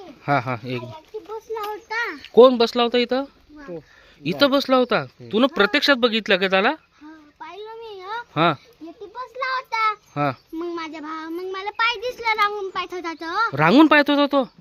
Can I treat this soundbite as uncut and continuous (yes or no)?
yes